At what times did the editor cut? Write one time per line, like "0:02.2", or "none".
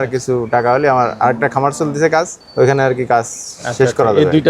0:02.4

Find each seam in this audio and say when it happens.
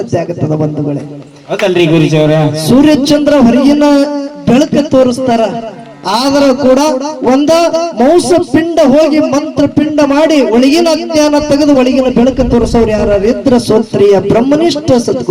none

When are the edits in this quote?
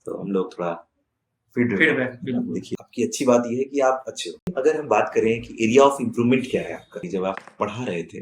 0:02.7
0:04.5
0:07.1

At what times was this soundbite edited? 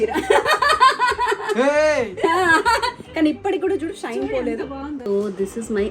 0:05.0

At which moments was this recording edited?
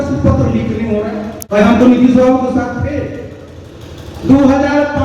0:01.4

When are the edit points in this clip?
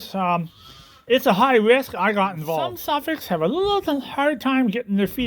0:02.8

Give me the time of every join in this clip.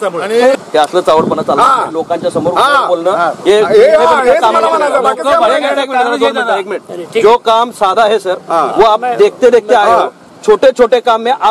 none

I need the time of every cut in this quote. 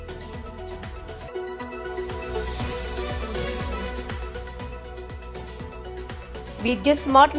0:01.3
0:04.7

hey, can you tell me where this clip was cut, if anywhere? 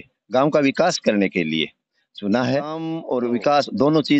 0:03.0

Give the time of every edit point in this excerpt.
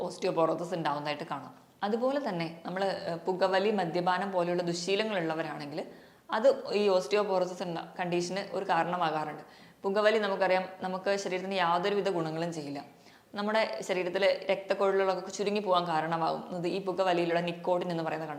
none

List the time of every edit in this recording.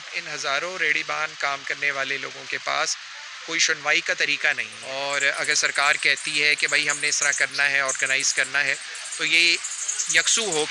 0:04.7

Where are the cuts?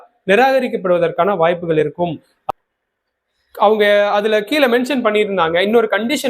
0:02.3

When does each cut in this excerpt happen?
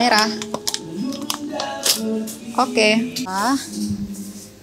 0:03.2

